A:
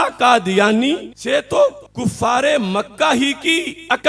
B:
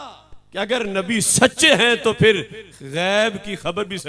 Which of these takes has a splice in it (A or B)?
A